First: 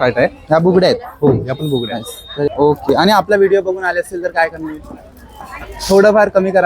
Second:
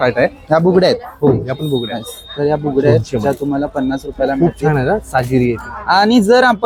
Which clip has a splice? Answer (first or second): first